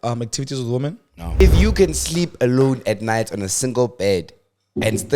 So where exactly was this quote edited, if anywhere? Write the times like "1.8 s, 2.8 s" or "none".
1.4 s